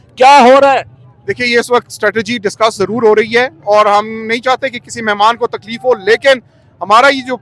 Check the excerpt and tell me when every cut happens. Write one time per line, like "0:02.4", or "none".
none